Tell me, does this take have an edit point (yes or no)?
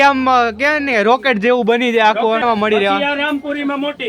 yes